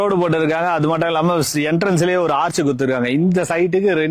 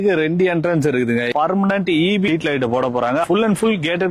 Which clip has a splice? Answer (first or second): second